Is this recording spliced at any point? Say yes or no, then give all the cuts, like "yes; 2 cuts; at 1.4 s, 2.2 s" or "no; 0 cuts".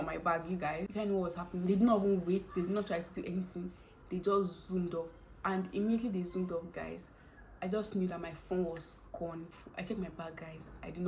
yes; 2 cuts; at 0.9 s, 9.5 s